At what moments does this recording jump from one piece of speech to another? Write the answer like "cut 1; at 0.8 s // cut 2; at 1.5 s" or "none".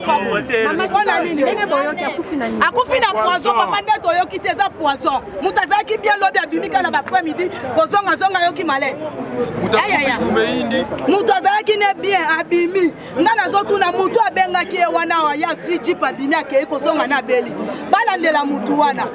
none